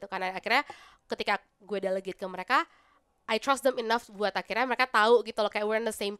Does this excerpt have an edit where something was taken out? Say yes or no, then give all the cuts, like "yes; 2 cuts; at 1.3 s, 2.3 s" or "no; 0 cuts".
no; 0 cuts